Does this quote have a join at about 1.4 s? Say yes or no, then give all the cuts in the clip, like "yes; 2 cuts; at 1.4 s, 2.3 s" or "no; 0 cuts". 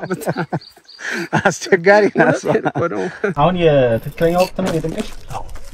no; 1 cut; at 3.2 s